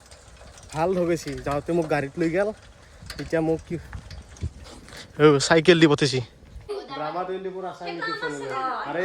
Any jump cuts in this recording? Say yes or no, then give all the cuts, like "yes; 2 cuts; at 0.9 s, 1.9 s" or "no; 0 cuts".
yes; 1 cut; at 6.8 s